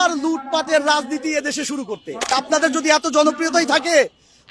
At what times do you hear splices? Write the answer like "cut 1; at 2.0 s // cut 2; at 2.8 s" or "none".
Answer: cut 1; at 2.3 s